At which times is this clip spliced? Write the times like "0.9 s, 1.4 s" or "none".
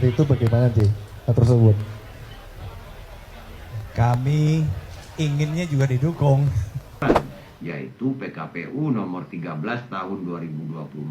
7.0 s